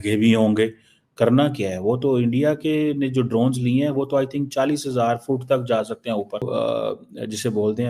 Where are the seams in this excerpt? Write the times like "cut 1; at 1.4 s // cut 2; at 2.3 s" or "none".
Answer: cut 1; at 6.5 s